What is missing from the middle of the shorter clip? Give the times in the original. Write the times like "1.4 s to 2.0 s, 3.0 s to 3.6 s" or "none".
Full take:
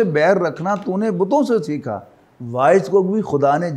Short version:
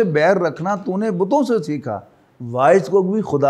none